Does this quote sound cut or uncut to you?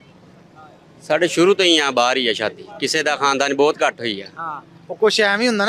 uncut